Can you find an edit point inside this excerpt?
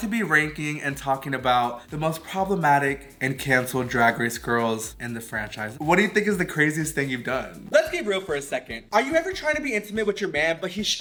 no; 0 cuts

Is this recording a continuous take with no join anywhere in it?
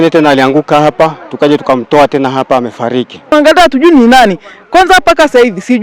no; 1 cut; at 3.3 s

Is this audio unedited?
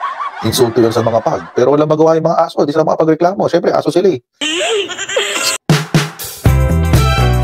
no; 1 cut; at 5.5 s

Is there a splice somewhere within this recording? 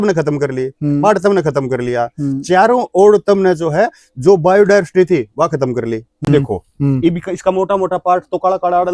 yes; 1 cut; at 6.3 s

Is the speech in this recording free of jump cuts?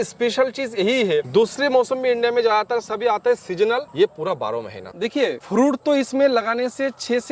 no; 1 cut; at 4.8 s

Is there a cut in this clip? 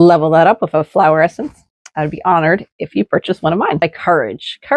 yes; 1 cut; at 3.8 s

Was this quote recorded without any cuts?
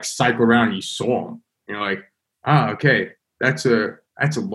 yes; 0 cuts

